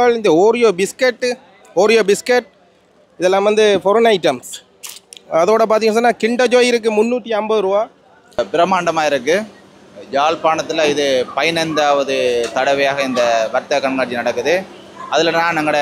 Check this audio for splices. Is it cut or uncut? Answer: cut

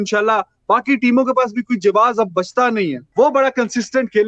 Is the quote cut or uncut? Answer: cut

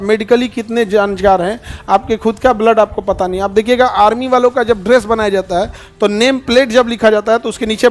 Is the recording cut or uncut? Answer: uncut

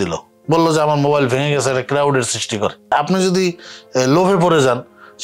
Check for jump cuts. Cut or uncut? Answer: cut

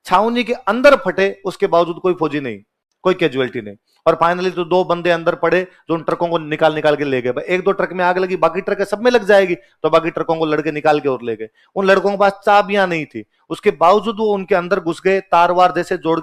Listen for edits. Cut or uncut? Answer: uncut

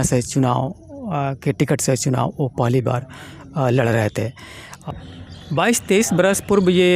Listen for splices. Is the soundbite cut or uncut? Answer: cut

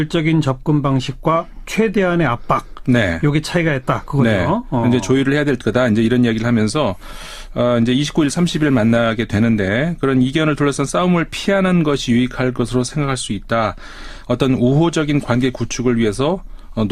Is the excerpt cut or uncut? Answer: uncut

